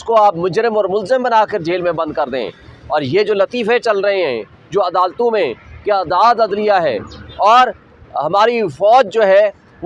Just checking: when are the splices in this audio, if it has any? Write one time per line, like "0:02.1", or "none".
none